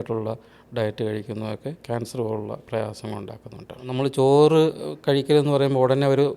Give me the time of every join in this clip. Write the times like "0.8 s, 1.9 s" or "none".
1.8 s, 3.9 s